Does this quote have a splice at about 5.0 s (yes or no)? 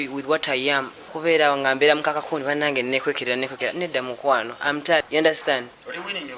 yes